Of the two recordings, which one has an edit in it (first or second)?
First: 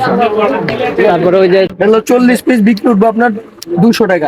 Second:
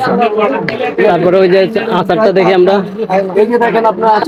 first